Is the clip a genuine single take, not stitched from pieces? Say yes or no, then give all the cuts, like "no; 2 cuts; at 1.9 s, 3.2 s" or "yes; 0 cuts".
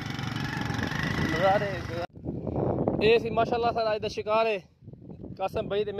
no; 1 cut; at 2.0 s